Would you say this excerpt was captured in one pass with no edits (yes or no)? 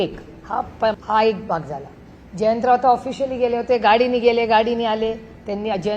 no